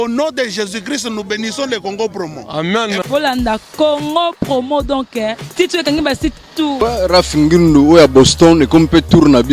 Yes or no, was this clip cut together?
yes